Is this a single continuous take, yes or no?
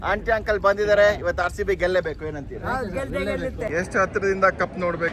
no